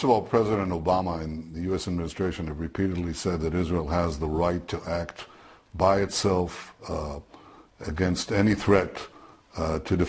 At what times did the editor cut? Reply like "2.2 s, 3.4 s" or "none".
none